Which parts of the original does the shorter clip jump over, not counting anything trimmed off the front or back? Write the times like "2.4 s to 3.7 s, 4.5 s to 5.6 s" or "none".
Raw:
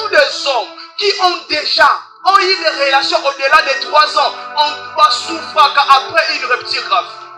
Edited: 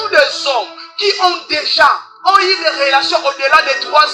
none